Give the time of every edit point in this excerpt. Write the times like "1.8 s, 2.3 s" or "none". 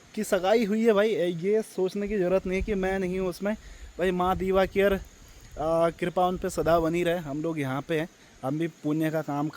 none